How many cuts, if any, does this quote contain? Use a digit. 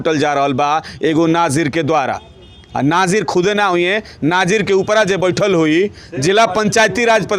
0